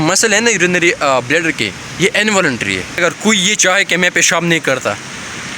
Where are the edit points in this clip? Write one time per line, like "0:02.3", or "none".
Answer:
0:02.9